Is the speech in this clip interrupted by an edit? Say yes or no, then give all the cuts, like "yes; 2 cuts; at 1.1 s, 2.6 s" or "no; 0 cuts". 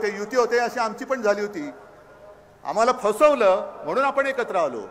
no; 0 cuts